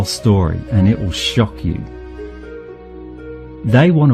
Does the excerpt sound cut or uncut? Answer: uncut